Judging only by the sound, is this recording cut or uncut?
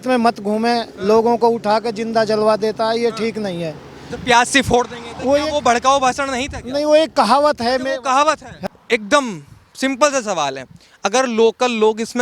cut